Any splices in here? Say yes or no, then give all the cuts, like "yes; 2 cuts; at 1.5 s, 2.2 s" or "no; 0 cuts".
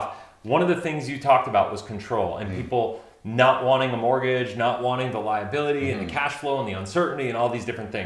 no; 0 cuts